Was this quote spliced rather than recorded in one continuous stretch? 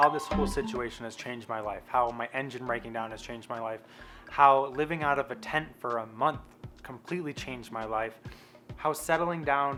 no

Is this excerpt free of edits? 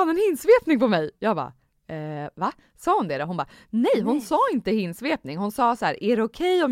yes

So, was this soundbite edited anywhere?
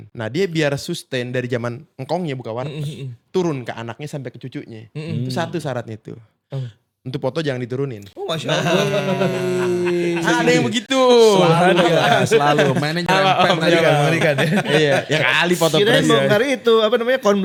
no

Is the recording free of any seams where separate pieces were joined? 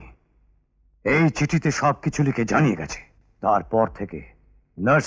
yes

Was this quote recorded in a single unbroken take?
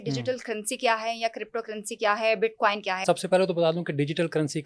no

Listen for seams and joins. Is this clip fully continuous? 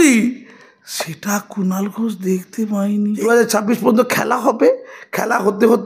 no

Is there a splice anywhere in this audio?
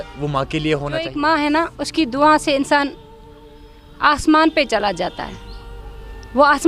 yes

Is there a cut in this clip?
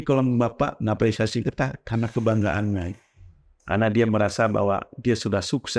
no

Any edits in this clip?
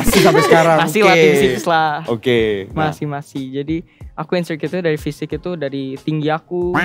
no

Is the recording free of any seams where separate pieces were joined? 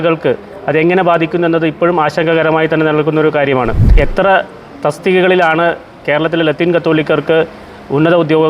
no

